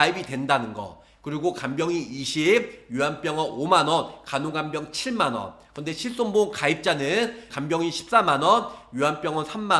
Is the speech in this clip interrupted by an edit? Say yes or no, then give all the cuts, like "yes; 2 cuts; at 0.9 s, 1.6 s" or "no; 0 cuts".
yes; 1 cut; at 7.4 s